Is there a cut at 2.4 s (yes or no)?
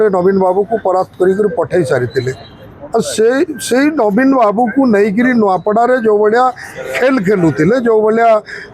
no